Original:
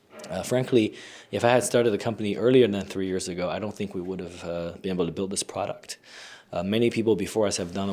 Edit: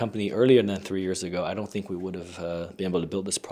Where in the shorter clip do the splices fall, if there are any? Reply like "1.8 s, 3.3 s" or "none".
none